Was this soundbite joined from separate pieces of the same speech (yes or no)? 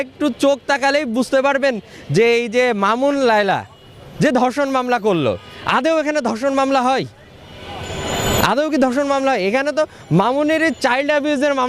no